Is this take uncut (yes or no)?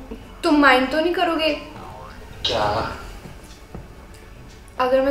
yes